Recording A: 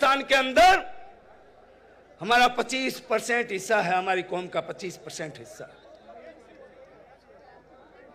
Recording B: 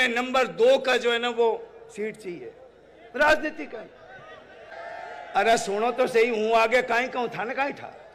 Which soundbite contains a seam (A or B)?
B